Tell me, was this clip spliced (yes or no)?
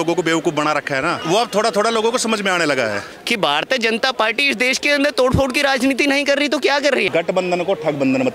yes